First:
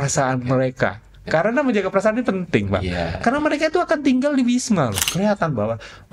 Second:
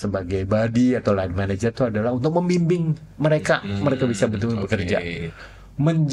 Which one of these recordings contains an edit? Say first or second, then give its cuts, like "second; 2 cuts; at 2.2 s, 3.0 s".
first; 1 cut; at 5.0 s